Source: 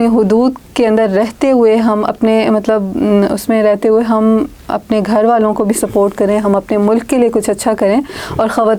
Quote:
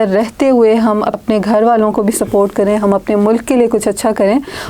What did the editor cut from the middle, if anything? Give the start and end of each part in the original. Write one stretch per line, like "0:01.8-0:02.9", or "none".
0:02.2-0:04.8